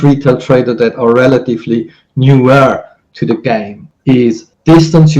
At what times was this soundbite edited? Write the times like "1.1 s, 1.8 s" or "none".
4.2 s